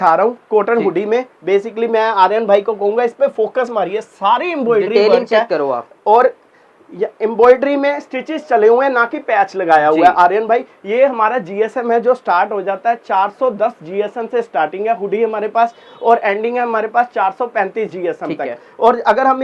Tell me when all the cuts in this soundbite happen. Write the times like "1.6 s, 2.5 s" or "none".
none